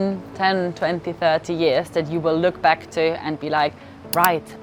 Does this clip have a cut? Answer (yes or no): no